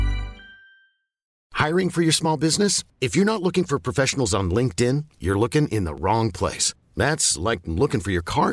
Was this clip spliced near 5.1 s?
no; 1 cut; at 1.3 s

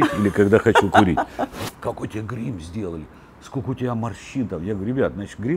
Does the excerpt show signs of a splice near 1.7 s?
yes; 1 cut; at 1.7 s

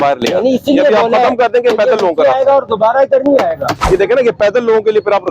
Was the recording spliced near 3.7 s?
yes; 1 cut; at 3.7 s

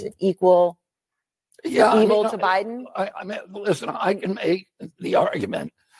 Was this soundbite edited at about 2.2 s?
yes; 1 cut; at 2.2 s

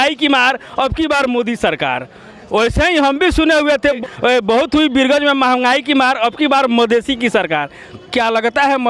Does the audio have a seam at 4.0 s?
yes; 1 cut; at 4.0 s

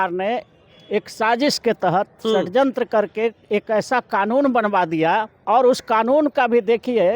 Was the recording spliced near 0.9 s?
no; 1 cut; at 5.4 s

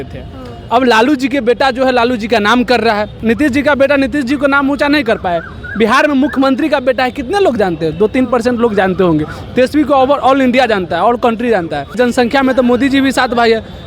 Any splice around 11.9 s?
yes; 2 cuts; at 3.1 s, 11.9 s

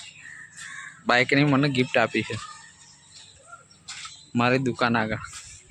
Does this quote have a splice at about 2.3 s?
no; 0 cuts

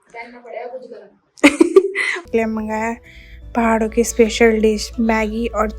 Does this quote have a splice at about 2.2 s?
yes; 1 cut; at 2.2 s

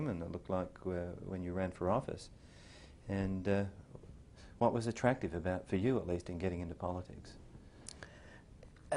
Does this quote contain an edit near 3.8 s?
yes; 1 cut; at 3.8 s

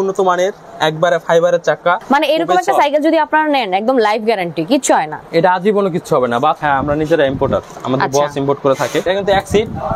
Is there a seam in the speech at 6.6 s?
yes; 3 cuts; at 2.0 s, 6.6 s, 9.0 s

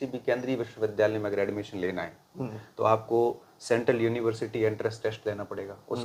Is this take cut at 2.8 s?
no; 0 cuts

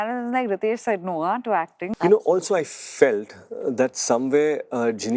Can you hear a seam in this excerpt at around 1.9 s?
yes; 1 cut; at 1.9 s

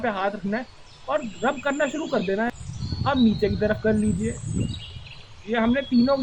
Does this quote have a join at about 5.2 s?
no; 1 cut; at 2.5 s

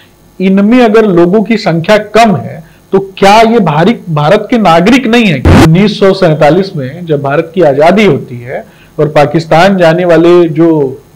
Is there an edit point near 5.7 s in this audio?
yes; 1 cut; at 5.7 s

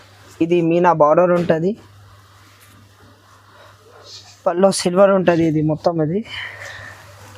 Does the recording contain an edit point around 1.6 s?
no; 0 cuts

